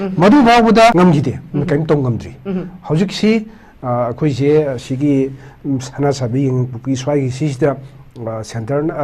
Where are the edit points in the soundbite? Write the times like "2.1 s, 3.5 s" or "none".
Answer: 0.9 s